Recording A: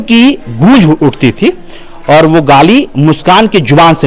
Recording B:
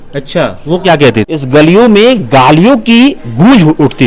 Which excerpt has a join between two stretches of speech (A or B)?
B